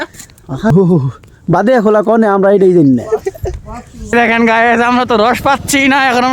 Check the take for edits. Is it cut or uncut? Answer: cut